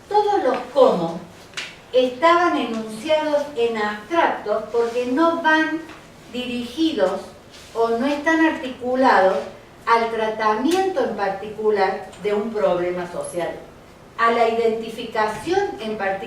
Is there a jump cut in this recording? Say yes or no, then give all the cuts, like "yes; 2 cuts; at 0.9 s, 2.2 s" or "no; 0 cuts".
yes; 1 cut; at 10.6 s